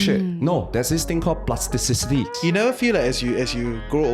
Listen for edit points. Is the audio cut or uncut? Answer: cut